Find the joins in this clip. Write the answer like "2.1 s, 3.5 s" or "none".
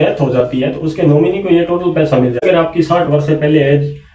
2.4 s